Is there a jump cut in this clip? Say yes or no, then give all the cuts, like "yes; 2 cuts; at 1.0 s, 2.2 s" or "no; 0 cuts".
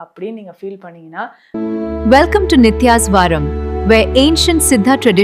yes; 1 cut; at 1.4 s